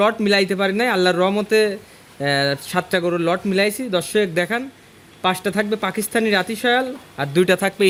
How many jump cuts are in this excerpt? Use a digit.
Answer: 0